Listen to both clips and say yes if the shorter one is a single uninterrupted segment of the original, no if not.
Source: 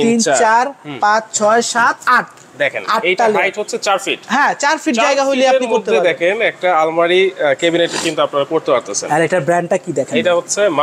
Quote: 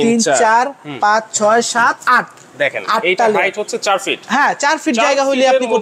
yes